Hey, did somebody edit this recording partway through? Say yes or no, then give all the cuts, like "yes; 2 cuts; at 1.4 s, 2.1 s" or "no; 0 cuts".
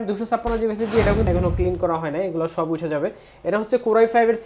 yes; 1 cut; at 1.3 s